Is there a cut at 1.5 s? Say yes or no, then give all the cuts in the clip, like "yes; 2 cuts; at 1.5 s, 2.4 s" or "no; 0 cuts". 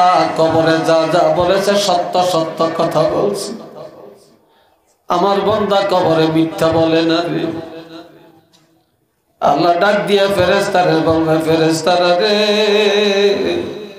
no; 0 cuts